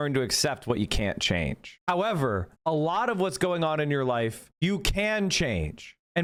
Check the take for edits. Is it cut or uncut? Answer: uncut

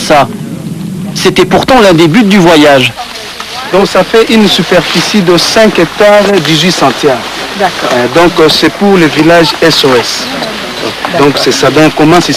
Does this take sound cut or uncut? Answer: uncut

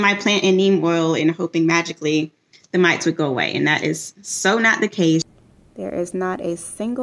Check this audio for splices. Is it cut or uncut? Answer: cut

